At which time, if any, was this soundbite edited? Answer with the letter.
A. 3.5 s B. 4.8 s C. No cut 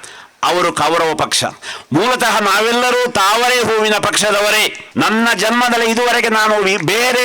B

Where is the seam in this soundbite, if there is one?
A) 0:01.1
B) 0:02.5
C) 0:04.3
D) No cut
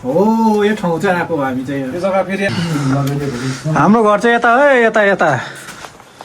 B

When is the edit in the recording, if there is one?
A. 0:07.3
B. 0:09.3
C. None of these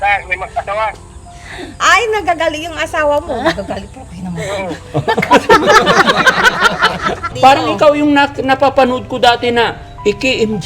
A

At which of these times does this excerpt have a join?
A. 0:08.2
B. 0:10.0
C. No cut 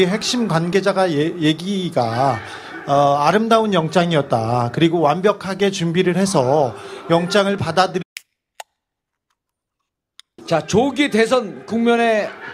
C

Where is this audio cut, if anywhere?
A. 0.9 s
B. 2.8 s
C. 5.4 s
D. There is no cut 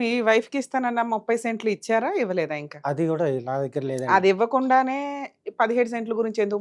D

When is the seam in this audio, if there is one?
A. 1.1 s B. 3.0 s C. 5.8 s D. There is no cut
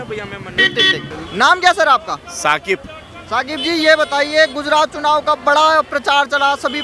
D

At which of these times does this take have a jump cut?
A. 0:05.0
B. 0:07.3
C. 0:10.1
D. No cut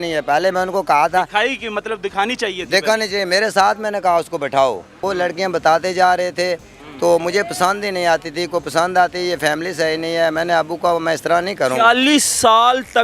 A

